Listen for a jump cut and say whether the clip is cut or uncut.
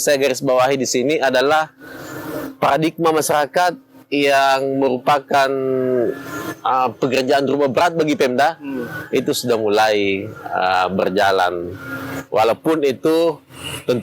uncut